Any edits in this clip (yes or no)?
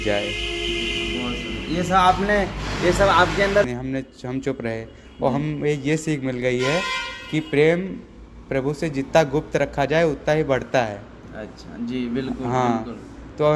yes